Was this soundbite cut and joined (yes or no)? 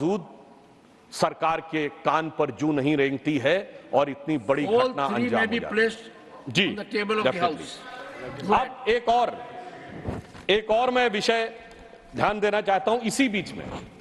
no